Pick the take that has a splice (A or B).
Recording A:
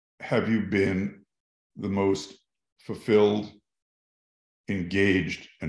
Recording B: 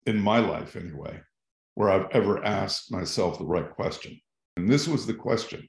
B